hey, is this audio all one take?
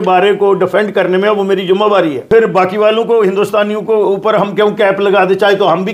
no; 1 cut; at 2.3 s

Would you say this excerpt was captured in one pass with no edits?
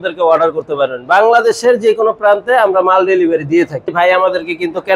no; 1 cut; at 3.9 s

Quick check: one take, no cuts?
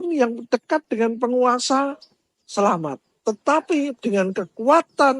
yes; 0 cuts

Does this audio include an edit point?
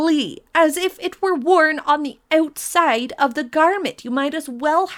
no; 0 cuts

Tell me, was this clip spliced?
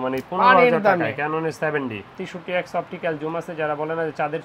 yes; 1 cut; at 2.2 s

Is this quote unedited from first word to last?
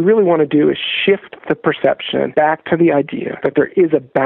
no; 2 cuts; at 2.3 s, 3.2 s

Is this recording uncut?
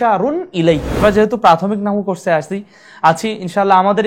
no; 1 cut; at 0.9 s

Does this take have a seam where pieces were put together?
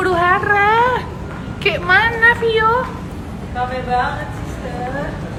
no; 0 cuts

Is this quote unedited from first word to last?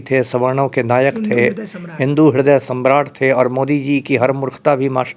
yes; 0 cuts

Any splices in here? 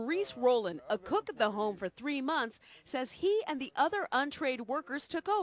yes; 1 cut; at 1.3 s

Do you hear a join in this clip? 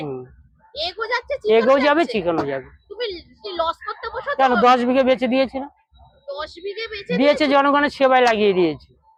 no; 0 cuts

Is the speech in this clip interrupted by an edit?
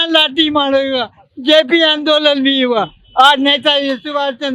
no; 0 cuts

